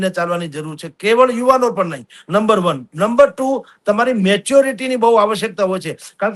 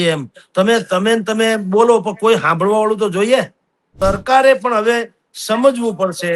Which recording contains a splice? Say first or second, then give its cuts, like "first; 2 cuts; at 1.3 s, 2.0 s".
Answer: second; 1 cut; at 3.9 s